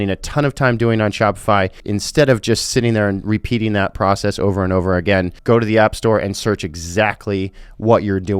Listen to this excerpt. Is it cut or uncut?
cut